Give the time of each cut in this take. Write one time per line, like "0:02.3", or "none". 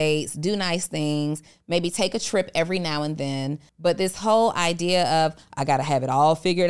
0:03.6